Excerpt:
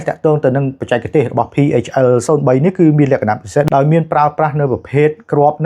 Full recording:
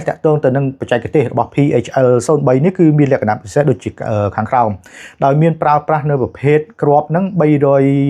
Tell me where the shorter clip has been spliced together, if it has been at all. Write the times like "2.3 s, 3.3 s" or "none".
3.7 s